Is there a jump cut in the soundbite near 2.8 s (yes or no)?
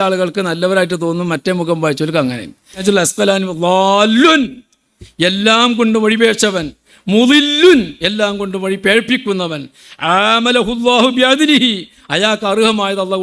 yes